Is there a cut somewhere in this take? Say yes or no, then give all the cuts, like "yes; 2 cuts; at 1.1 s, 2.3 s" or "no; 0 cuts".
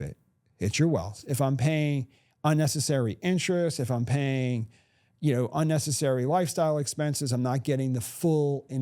yes; 1 cut; at 1.2 s